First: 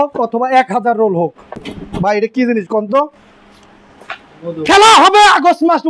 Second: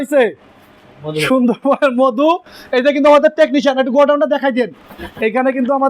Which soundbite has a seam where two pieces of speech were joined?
first; 1 cut; at 1.7 s

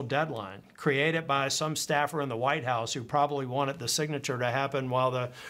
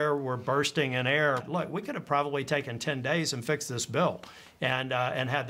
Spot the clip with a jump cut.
second; 1 cut; at 1.4 s

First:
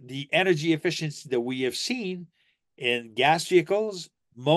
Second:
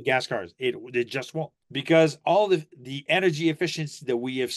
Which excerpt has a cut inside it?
second; 1 cut; at 1.6 s

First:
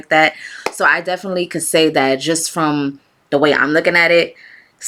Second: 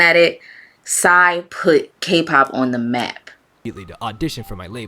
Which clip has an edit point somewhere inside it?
second; 1 cut; at 3.8 s

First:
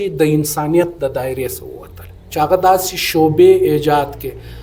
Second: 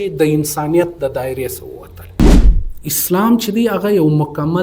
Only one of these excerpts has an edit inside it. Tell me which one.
second; 1 cut; at 2.4 s

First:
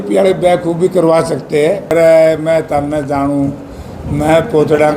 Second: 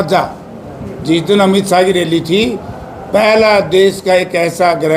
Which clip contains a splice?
first; 1 cut; at 1.9 s

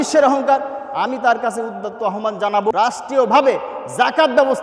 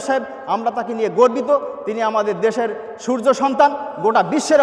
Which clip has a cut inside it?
first; 1 cut; at 2.7 s

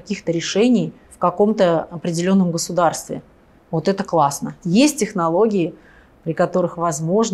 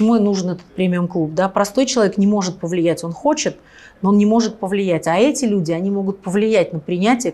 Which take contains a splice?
first; 2 cuts; at 1.0 s, 4.6 s

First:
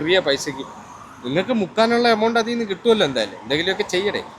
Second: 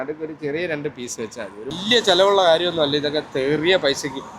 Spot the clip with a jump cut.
second; 1 cut; at 1.7 s

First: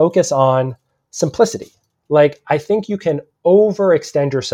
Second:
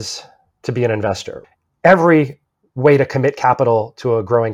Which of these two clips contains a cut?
second; 2 cuts; at 1.4 s, 2.4 s

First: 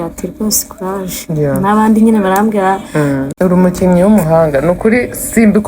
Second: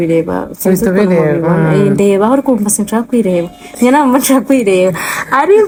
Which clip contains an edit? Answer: first; 1 cut; at 3.3 s

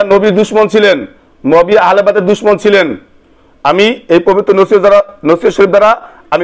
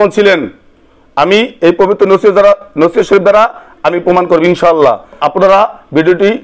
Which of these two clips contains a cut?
second; 1 cut; at 5.2 s

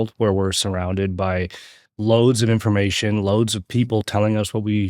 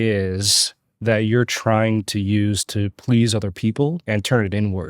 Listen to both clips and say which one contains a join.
second; 1 cut; at 4.0 s

